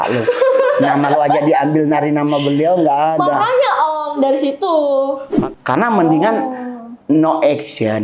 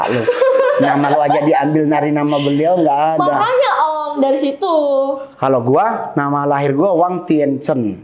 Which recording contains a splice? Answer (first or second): first